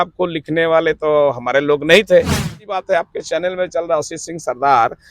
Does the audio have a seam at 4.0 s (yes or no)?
no